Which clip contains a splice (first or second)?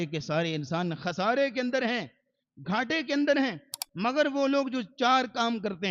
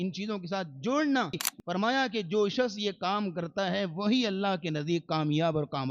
second